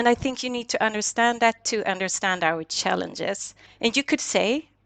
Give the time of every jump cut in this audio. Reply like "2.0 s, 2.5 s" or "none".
3.7 s